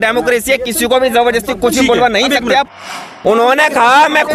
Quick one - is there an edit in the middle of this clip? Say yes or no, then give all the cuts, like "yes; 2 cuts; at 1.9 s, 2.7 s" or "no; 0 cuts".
yes; 1 cut; at 2.9 s